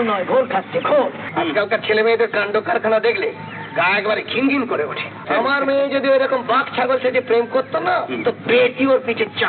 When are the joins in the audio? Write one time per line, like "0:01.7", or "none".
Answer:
0:01.2
0:05.3